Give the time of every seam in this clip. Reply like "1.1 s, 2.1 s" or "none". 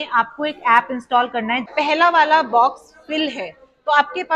1.7 s

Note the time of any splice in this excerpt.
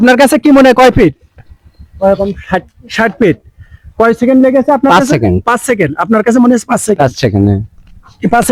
none

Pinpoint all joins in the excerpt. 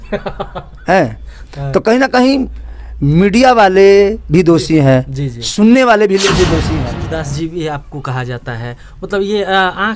6.7 s

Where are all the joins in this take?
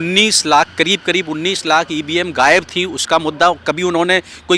none

